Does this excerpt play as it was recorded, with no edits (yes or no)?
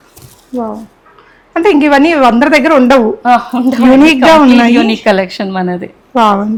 yes